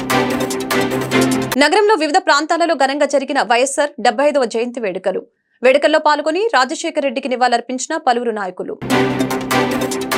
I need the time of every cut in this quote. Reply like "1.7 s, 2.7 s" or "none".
none

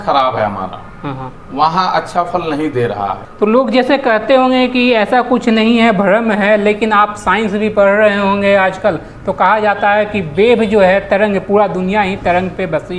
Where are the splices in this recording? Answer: 3.2 s

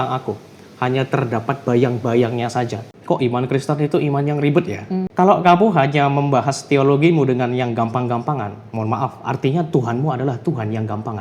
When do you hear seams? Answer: 2.8 s, 5.1 s

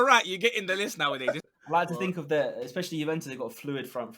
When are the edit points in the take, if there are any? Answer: 1.4 s

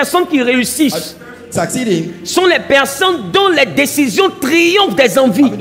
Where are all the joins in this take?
none

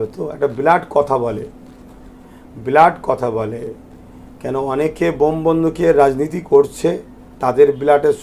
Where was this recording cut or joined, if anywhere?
none

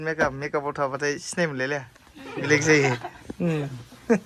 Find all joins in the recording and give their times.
none

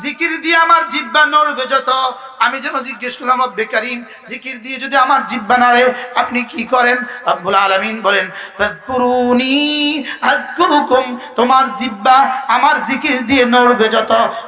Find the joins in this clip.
none

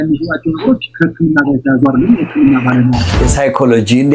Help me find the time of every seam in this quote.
3.2 s

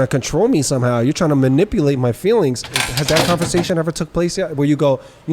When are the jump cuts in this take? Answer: 2.8 s

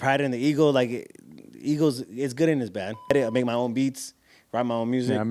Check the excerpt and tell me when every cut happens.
3.1 s

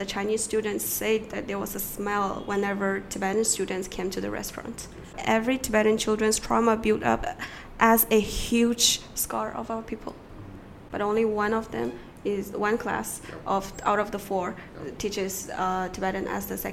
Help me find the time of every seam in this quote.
5.2 s, 10.8 s

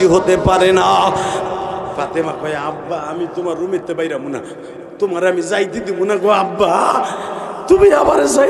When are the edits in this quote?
1.4 s

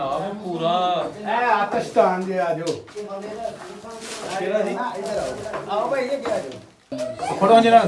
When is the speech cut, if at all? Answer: 6.9 s

